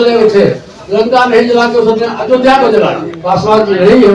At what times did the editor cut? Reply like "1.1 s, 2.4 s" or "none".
3.1 s